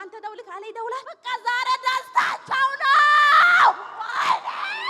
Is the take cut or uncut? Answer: cut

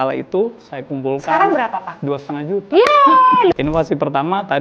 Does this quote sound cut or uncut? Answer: cut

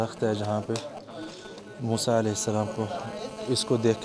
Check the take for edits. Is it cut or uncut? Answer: uncut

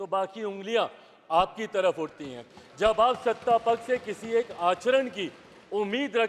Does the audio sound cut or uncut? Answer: uncut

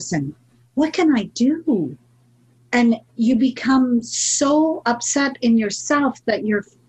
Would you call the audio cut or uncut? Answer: uncut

